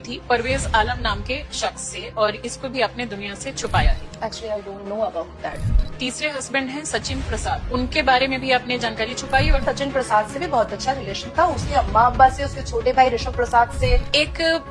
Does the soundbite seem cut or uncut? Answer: uncut